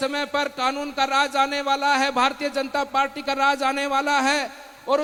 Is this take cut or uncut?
uncut